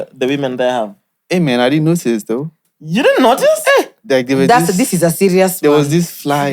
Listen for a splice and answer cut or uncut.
uncut